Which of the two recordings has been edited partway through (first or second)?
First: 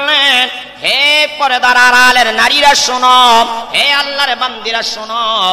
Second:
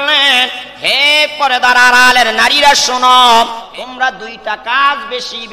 second